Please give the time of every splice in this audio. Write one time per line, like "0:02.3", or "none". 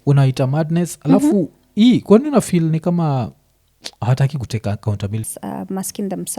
0:05.3